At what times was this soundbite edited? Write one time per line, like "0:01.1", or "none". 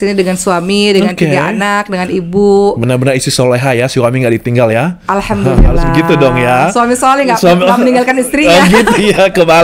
none